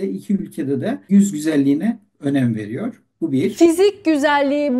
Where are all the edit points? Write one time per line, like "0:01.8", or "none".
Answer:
0:01.1